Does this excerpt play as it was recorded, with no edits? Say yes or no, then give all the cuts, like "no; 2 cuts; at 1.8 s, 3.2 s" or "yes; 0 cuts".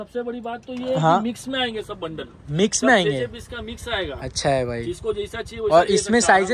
yes; 0 cuts